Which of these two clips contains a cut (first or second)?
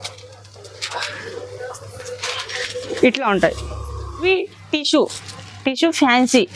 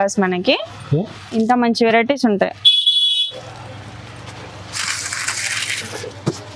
first